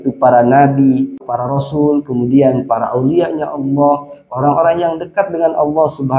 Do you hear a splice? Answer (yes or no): yes